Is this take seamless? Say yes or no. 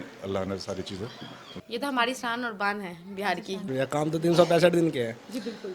no